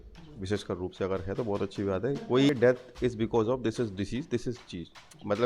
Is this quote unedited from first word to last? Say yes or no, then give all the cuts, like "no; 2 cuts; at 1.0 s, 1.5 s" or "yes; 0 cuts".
no; 1 cut; at 2.5 s